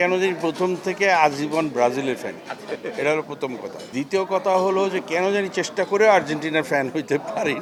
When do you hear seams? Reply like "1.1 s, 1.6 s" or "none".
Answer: none

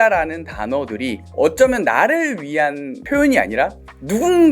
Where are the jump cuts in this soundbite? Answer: 1.2 s, 2.9 s

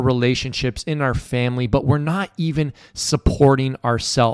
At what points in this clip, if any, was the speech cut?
none

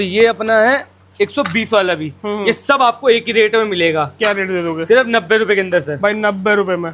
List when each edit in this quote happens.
none

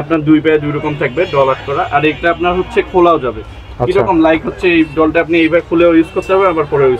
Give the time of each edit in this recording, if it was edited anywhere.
none

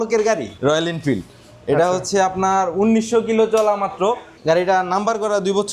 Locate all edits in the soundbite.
4.3 s

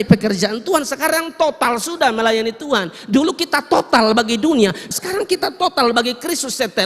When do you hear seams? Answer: 4.9 s

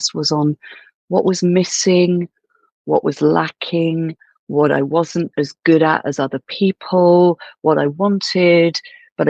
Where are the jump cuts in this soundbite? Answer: none

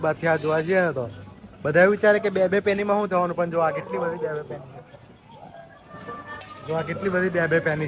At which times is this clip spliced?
none

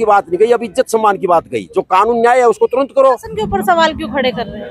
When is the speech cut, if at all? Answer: 3.3 s

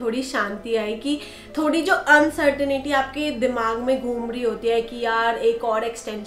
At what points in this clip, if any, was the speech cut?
none

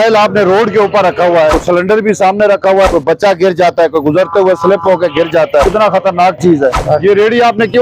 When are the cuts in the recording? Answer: 1.6 s, 2.9 s, 5.6 s, 6.8 s

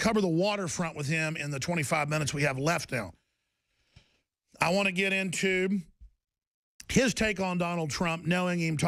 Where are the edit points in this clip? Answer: none

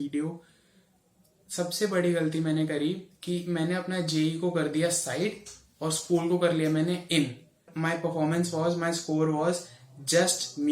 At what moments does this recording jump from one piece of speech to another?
7.7 s

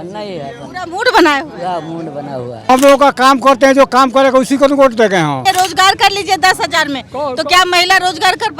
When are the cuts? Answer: 2.7 s, 5.4 s

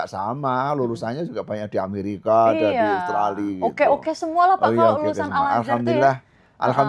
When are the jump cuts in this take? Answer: none

